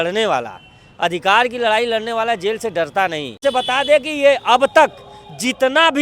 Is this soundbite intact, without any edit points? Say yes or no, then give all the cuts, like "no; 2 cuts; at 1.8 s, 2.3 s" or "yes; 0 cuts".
no; 1 cut; at 3.4 s